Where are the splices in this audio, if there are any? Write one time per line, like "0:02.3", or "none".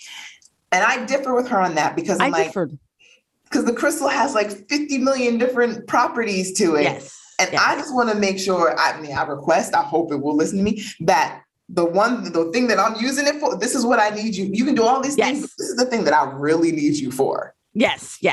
none